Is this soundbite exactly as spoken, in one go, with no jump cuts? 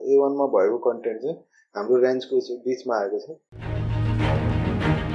no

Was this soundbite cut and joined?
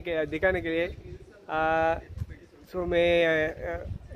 no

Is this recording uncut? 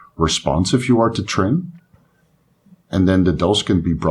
yes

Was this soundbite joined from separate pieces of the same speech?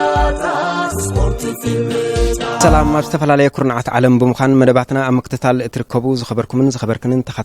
yes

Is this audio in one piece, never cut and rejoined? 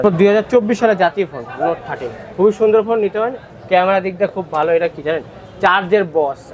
no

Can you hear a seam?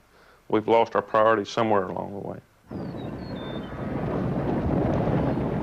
yes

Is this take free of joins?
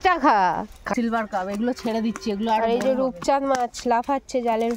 no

